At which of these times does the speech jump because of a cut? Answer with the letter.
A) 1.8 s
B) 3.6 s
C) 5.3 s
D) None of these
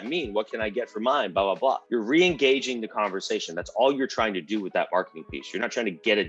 A